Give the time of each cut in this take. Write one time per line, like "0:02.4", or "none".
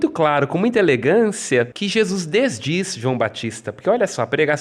0:01.7